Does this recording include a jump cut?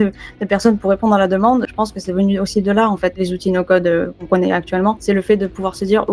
yes; 4 cuts; at 1.7 s, 3.2 s, 4.3 s, 5.0 s

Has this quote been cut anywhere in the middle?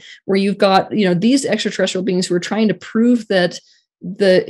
no; 0 cuts

